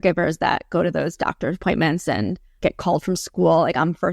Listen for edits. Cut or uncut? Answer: cut